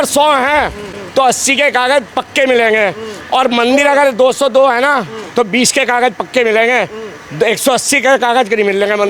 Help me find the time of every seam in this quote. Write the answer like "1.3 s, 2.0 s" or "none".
0.9 s